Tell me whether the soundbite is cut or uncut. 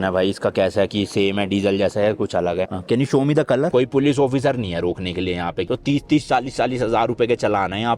cut